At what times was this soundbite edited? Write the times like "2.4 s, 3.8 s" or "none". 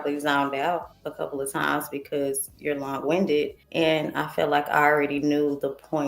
1.0 s, 3.6 s